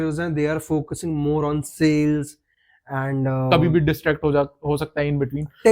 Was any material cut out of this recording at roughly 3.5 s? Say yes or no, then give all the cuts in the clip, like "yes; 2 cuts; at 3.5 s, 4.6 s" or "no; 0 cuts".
yes; 1 cut; at 3.5 s